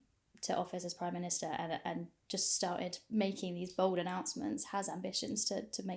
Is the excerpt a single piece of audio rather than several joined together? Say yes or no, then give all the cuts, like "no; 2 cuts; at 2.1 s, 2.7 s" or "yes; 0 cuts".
yes; 0 cuts